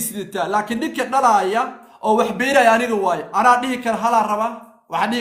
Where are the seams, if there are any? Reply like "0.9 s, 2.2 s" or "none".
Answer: none

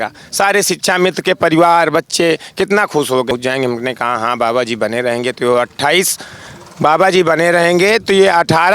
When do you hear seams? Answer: 3.3 s

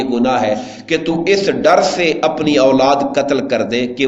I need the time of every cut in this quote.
none

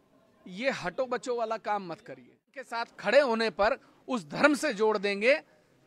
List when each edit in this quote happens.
2.7 s

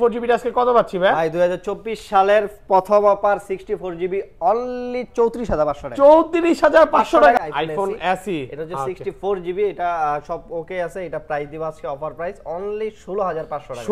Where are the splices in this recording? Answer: 7.4 s

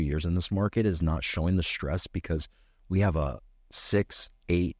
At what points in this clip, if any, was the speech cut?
none

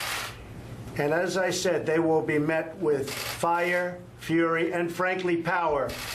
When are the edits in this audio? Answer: none

